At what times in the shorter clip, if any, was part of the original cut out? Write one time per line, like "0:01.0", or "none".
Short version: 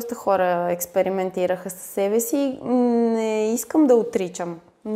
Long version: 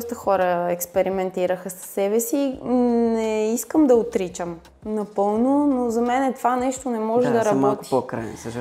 none